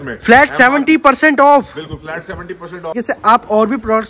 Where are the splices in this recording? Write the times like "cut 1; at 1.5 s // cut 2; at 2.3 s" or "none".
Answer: cut 1; at 2.9 s